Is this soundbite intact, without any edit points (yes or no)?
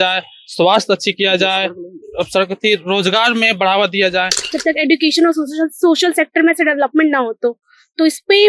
no